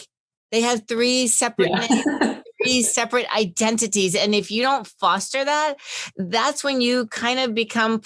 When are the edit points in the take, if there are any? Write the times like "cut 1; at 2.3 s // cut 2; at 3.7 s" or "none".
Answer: none